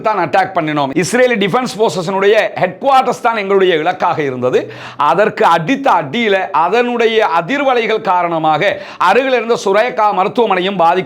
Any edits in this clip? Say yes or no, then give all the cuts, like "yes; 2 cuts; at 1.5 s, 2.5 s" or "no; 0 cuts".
no; 0 cuts